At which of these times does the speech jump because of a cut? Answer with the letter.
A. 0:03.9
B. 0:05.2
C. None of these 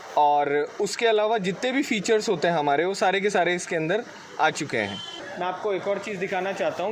B